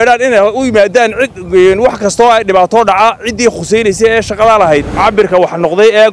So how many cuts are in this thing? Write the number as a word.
one